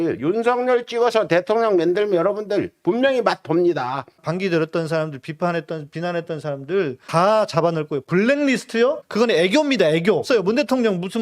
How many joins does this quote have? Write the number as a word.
two